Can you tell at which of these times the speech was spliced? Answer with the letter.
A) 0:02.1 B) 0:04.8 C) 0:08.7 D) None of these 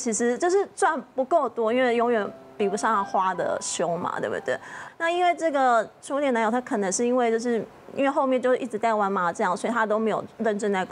B